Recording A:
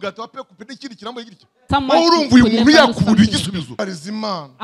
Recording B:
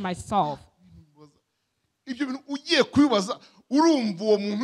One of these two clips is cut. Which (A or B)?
A